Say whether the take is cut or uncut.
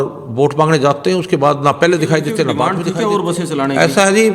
cut